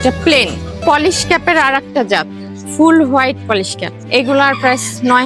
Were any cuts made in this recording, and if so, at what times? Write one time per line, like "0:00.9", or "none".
none